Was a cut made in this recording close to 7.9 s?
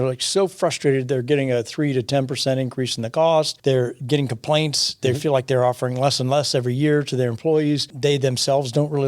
yes; 2 cuts; at 3.5 s, 7.9 s

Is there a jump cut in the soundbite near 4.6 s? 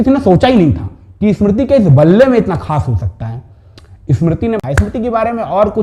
yes; 1 cut; at 4.6 s

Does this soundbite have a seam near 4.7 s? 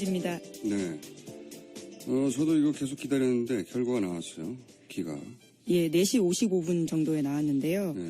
no; 1 cut; at 1.6 s

